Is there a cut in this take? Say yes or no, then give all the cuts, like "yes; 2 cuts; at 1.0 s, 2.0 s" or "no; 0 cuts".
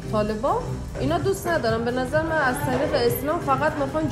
no; 0 cuts